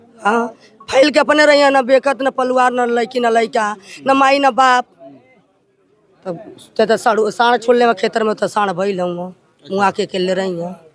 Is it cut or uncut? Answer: uncut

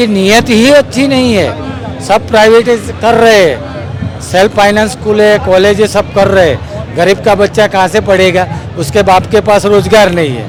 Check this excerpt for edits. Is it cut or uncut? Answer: uncut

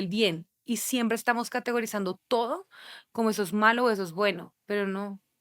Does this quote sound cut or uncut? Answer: cut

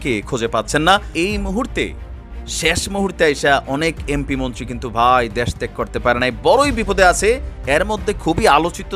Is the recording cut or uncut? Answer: cut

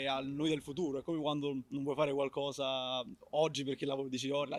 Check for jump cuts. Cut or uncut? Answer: uncut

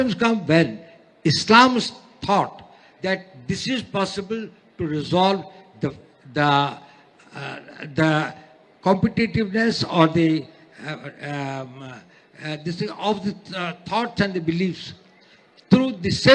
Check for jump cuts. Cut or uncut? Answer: uncut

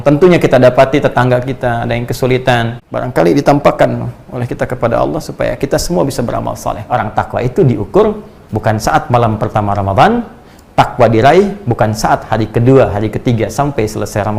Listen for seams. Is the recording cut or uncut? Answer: cut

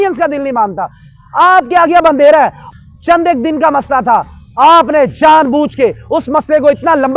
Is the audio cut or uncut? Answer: cut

